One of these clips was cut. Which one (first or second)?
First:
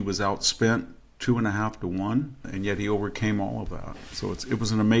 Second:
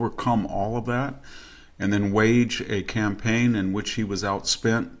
first